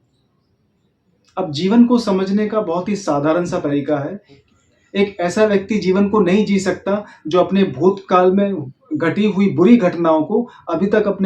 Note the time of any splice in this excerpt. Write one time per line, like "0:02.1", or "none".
0:04.4

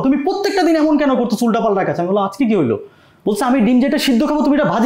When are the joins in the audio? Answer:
none

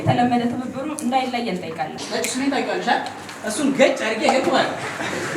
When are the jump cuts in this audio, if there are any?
0:02.0

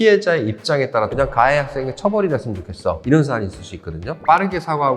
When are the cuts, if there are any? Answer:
0:01.1
0:04.1

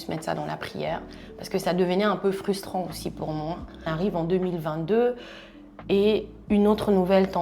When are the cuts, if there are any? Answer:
0:03.9

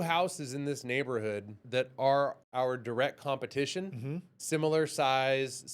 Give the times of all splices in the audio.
0:01.6
0:02.4

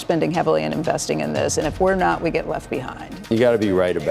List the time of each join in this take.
0:03.2

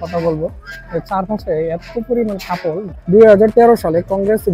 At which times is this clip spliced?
0:02.9

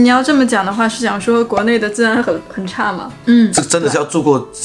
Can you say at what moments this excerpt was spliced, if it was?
0:03.1

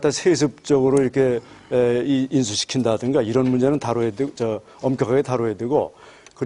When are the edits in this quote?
0:03.3

